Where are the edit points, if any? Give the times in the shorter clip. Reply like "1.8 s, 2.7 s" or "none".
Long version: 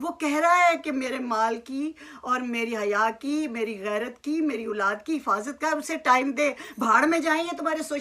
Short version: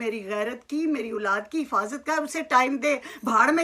none